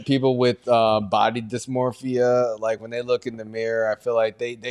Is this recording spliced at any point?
no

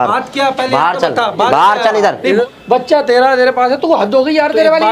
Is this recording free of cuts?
no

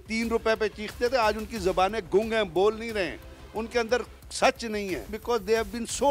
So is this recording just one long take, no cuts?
no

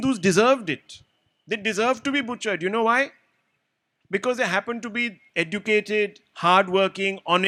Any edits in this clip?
no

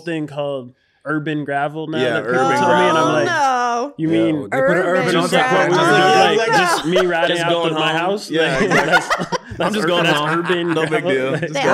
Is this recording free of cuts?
yes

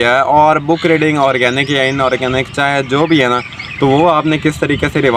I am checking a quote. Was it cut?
no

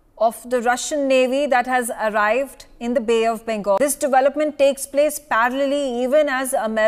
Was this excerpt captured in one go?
no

